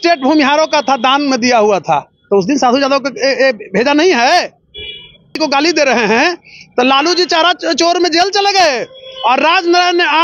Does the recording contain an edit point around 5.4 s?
yes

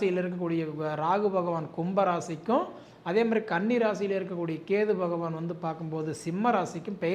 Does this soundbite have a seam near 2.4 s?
no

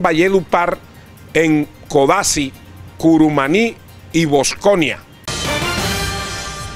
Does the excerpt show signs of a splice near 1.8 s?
no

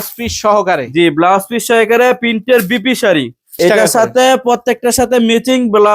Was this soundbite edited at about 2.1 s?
no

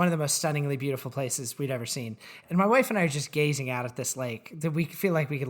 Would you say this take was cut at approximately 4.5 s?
no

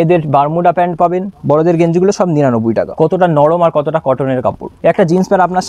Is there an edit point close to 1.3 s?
yes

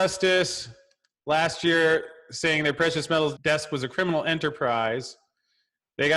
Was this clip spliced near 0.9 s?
no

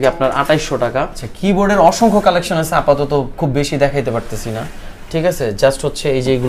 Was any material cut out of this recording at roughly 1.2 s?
yes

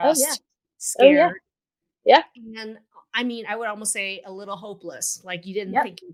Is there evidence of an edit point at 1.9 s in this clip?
no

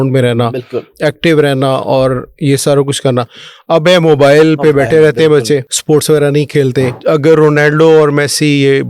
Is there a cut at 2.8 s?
no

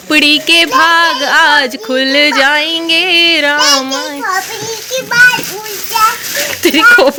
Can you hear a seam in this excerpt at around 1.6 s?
no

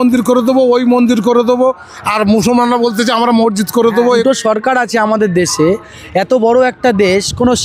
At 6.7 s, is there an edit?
no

